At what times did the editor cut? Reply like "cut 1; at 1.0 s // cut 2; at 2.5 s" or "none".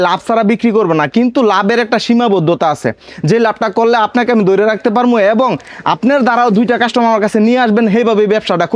none